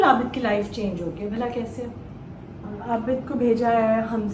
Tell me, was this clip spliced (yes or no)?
yes